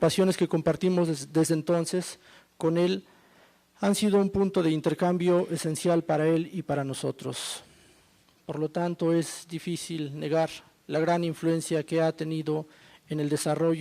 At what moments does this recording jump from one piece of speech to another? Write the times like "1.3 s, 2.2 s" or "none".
none